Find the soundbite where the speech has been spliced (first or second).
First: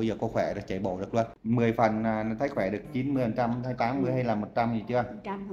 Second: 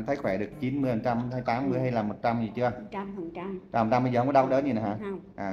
first